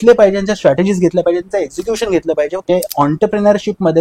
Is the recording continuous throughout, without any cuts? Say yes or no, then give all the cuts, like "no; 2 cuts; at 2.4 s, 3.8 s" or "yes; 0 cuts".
no; 1 cut; at 2.6 s